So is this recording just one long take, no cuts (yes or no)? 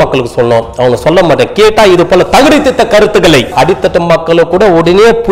no